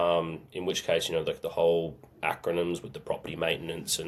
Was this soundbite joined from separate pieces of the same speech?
no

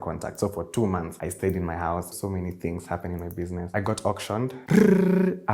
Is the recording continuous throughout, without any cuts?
no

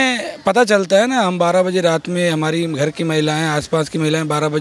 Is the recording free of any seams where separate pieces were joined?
yes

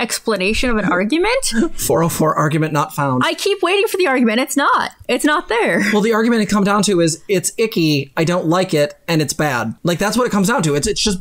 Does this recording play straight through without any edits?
yes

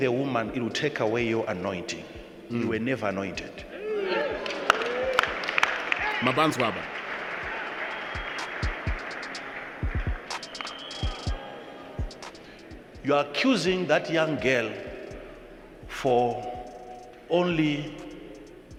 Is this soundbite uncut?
yes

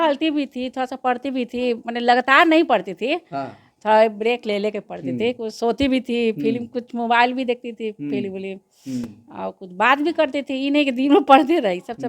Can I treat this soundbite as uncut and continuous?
yes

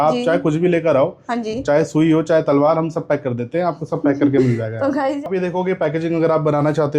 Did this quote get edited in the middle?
yes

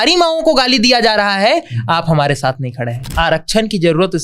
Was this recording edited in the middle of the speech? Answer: yes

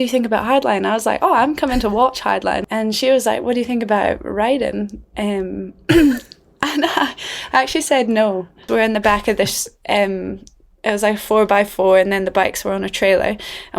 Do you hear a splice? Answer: yes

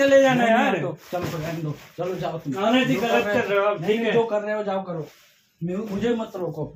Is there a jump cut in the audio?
no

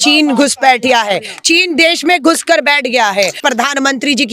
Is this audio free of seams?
no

